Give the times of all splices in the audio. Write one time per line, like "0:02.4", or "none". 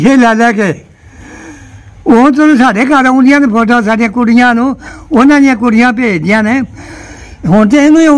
none